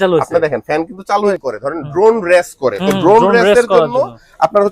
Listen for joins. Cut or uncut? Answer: cut